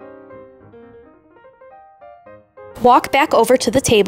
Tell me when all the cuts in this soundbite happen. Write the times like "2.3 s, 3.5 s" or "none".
none